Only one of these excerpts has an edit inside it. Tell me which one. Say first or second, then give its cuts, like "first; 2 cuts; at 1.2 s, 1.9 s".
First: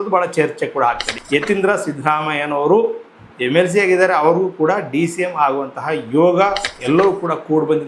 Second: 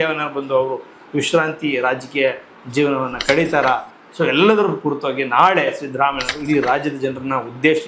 first; 2 cuts; at 1.1 s, 6.7 s